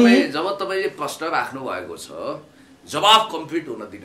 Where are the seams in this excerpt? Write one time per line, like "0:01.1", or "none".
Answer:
none